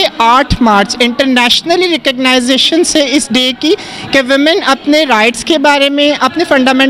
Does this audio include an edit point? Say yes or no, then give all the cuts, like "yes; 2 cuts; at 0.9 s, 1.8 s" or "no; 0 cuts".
no; 0 cuts